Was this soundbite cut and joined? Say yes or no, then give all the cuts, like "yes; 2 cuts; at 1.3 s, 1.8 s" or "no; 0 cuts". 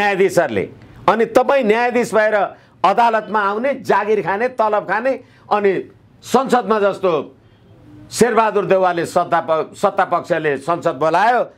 no; 0 cuts